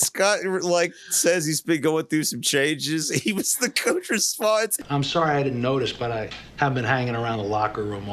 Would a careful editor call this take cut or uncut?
uncut